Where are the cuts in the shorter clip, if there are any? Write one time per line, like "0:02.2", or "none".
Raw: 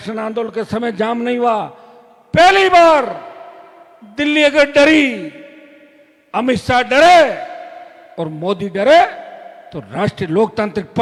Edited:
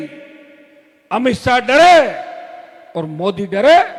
none